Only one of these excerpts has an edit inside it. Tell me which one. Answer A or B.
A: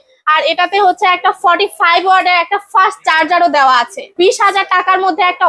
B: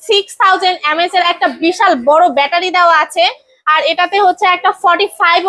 A